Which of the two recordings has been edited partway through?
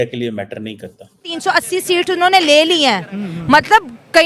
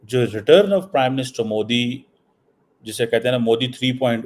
first; 1 cut; at 1.2 s

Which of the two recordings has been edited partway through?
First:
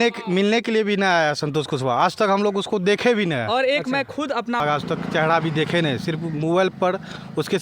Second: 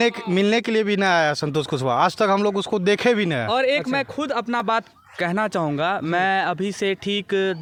first; 1 cut; at 4.6 s

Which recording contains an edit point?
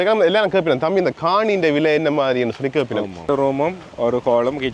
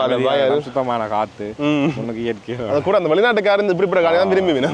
first; 1 cut; at 3.2 s

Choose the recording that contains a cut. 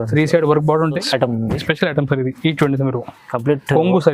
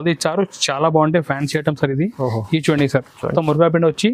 first; 1 cut; at 1.0 s

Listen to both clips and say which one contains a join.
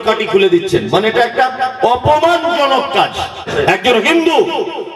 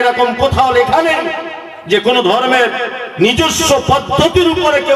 first; 1 cut; at 3.5 s

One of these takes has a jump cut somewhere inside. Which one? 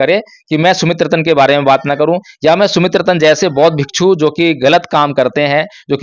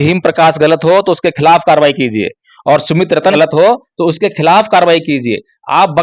second; 1 cut; at 3.3 s

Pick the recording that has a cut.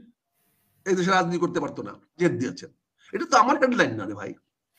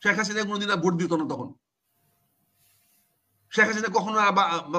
first; 1 cut; at 2.1 s

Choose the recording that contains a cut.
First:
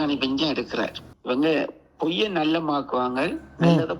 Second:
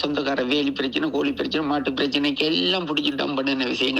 first; 1 cut; at 1.1 s

